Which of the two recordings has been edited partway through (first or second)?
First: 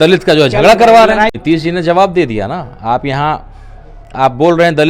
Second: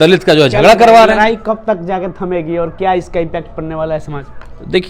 first